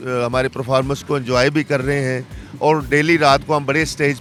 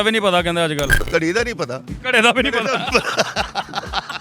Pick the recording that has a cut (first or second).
second